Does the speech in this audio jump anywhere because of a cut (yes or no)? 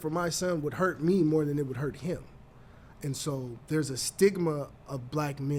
no